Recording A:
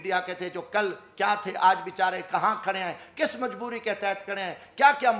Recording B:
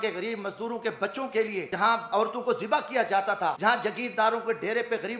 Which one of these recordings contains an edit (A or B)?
B